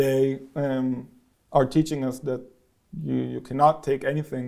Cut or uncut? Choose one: uncut